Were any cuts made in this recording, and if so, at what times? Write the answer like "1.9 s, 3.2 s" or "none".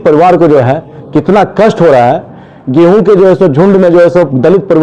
none

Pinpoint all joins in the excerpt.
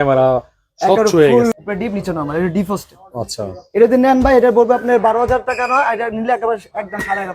1.5 s

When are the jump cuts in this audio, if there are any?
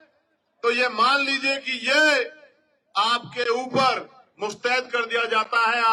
none

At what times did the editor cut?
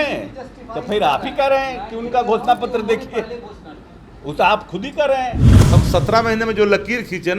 5.5 s

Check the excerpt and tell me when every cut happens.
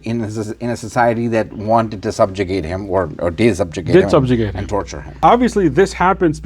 5.0 s

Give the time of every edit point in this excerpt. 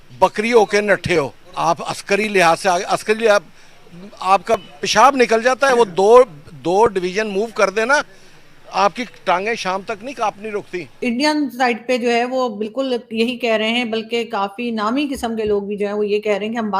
1.4 s, 11.0 s

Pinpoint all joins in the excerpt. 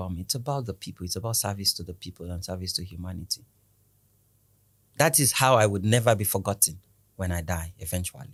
none

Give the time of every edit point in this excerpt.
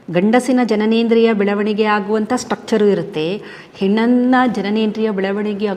none

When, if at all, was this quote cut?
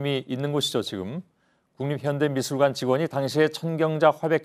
3.1 s

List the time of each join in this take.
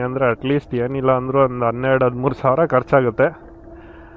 none

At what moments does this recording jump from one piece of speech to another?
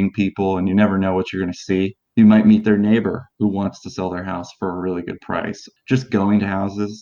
2.0 s, 5.6 s

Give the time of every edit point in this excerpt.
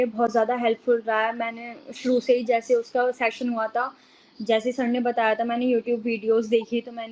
none

